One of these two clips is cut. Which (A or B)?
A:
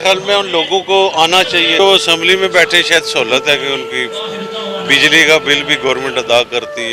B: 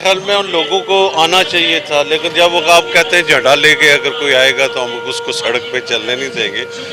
A